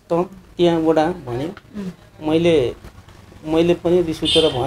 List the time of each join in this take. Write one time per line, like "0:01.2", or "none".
none